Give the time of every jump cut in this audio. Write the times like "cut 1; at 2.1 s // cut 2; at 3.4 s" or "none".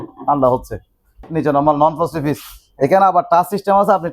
cut 1; at 1.3 s